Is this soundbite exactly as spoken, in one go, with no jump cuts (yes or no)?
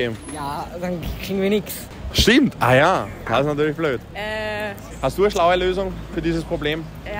no